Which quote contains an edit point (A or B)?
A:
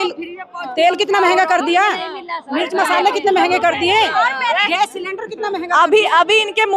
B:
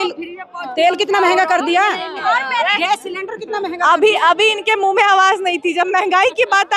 B